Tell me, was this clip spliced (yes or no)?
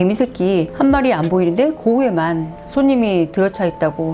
no